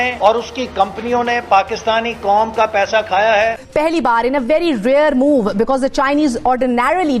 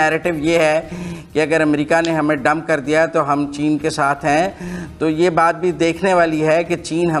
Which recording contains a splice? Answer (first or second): first